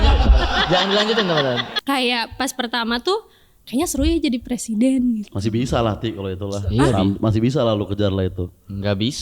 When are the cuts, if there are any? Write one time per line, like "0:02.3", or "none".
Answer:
0:01.7